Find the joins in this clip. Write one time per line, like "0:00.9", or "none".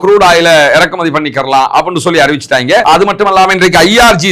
0:02.8